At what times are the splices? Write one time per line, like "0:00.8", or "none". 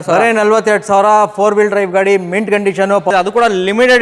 0:03.1